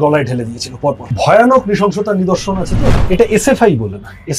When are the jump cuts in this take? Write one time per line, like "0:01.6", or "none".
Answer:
0:01.1
0:02.9